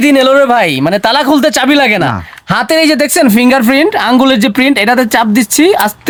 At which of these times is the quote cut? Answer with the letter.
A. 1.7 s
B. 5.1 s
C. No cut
C